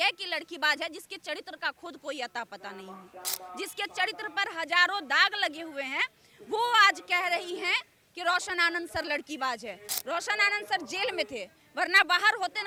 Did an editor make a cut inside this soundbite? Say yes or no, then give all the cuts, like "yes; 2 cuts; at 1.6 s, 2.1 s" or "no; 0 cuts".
no; 0 cuts